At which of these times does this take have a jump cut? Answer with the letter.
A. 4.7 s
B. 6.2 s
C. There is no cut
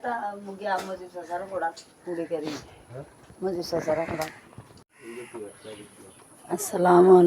C